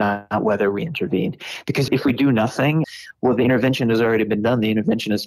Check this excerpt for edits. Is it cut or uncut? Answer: uncut